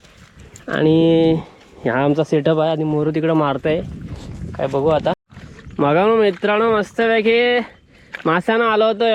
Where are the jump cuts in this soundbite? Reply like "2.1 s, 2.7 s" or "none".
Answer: 5.3 s